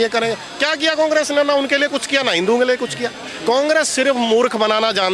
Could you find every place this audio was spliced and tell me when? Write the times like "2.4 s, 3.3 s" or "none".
none